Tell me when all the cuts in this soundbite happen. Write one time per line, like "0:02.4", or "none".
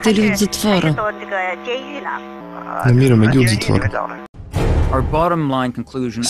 0:04.5